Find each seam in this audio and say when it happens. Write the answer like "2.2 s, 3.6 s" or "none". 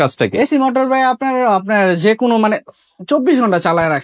none